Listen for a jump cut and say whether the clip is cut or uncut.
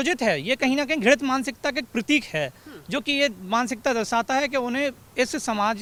uncut